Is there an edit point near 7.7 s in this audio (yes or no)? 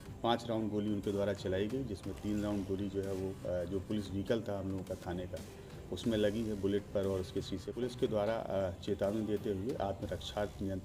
yes